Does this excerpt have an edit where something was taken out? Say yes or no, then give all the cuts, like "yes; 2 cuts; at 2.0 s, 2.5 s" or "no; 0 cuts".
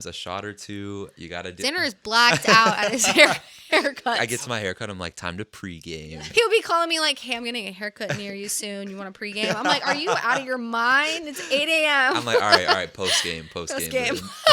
yes; 2 cuts; at 4.2 s, 6.0 s